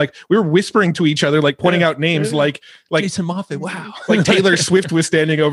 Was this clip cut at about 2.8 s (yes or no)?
no